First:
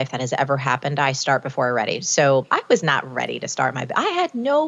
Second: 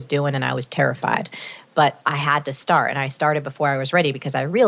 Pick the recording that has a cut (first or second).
first